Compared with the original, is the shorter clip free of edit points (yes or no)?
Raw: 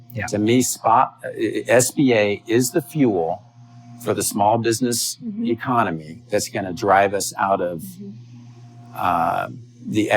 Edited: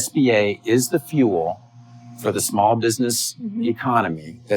yes